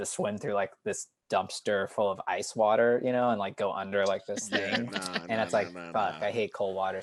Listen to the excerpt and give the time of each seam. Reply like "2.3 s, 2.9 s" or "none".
none

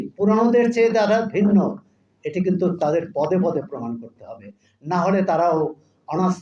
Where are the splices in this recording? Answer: none

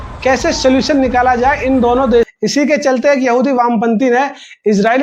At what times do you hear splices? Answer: 2.1 s

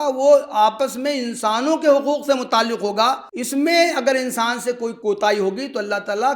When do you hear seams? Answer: 3.3 s, 4.9 s

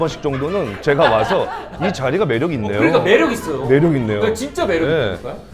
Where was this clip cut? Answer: none

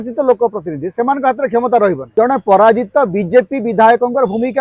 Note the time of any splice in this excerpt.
2.0 s

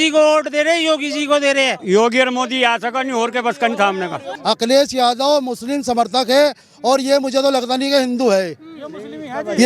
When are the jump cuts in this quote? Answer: 1.8 s, 4.3 s

